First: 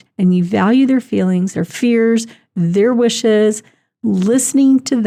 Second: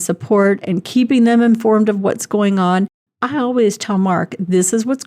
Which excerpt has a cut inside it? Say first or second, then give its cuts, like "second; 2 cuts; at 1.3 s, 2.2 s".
second; 1 cut; at 3.0 s